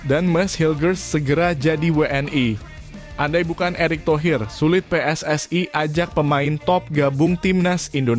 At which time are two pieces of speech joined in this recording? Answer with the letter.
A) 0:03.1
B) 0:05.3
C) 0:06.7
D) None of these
D